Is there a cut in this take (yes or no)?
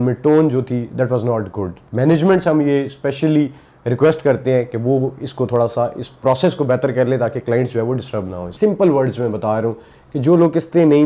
yes